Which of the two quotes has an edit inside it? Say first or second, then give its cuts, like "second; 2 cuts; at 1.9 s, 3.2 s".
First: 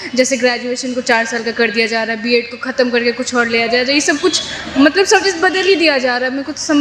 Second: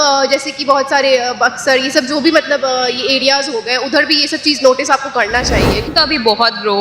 second; 1 cut; at 5.9 s